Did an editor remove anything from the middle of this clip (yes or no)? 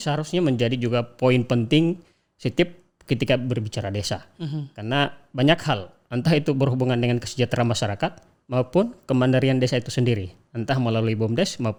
no